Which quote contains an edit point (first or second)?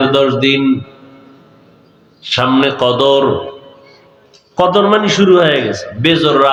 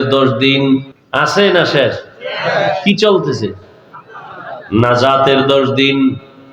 second